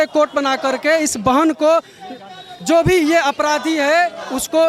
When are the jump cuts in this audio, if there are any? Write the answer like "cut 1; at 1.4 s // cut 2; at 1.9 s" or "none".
none